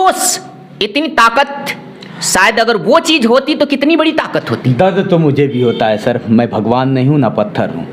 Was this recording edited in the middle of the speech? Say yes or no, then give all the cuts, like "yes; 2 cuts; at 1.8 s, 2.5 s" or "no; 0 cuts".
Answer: no; 0 cuts